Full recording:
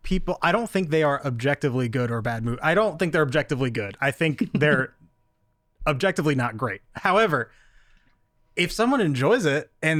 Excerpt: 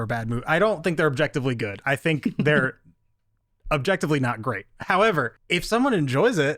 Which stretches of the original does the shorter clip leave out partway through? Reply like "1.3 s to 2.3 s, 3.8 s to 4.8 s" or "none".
7.5 s to 8.4 s